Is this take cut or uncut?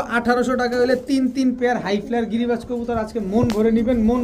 uncut